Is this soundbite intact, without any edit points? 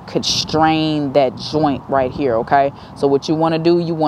yes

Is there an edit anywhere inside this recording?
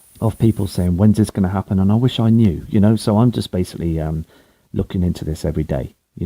yes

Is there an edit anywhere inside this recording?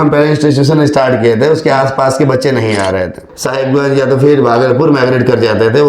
yes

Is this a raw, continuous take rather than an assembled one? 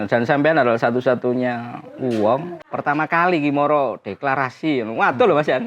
no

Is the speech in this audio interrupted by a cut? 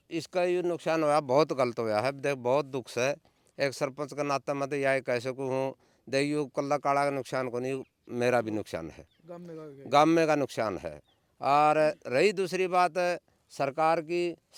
no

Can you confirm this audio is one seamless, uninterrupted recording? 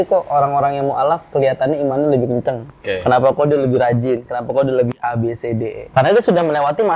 no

